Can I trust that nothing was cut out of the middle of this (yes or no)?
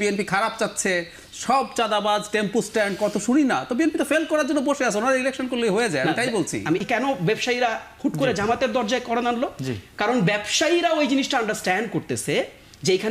no